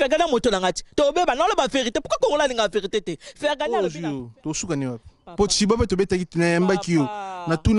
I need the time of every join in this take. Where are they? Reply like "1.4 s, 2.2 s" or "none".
3.8 s